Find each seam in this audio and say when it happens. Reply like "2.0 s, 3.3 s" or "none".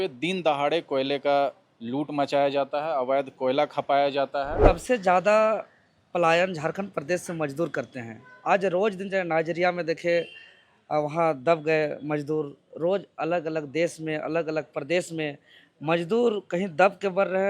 4.5 s